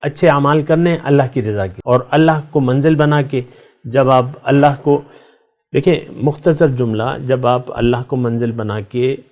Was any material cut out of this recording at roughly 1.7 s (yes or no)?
yes